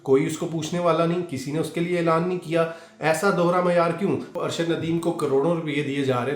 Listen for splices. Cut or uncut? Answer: cut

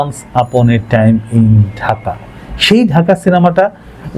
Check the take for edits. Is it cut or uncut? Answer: uncut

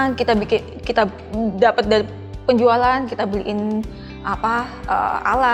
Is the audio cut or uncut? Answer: uncut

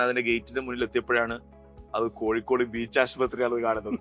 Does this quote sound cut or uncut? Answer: uncut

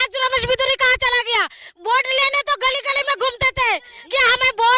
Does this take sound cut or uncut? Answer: uncut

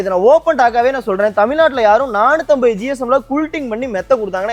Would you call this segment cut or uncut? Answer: uncut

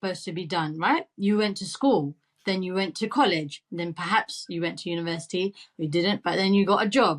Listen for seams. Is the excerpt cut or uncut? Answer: uncut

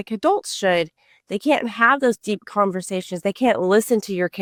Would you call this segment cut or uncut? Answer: uncut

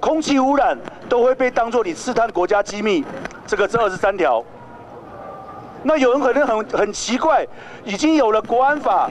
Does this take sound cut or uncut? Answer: uncut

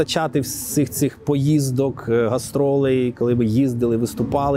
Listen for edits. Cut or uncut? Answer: uncut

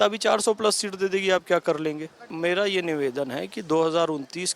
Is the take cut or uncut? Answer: cut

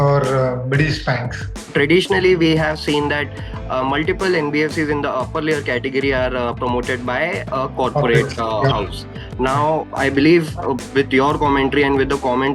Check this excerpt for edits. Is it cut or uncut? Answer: cut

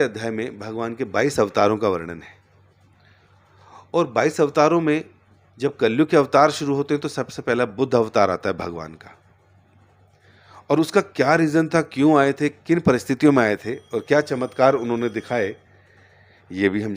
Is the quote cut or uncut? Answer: uncut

